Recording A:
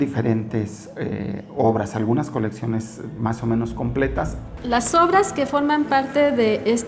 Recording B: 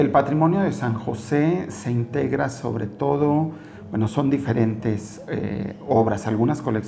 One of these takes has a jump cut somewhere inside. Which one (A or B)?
A